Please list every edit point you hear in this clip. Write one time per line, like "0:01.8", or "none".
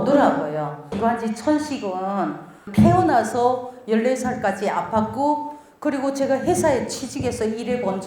0:00.9
0:02.7